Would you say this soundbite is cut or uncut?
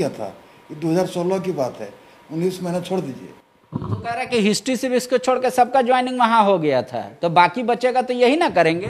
uncut